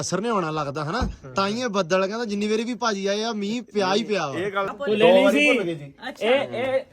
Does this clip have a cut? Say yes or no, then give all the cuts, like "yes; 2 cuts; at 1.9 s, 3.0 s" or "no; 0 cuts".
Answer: yes; 1 cut; at 4.7 s